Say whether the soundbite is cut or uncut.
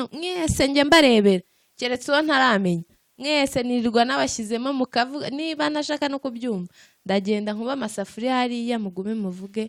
uncut